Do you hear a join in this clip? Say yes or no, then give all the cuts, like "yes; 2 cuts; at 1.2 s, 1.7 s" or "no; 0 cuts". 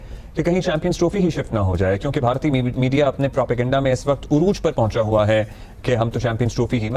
no; 0 cuts